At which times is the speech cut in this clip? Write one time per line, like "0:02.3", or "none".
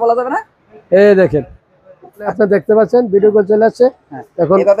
0:02.2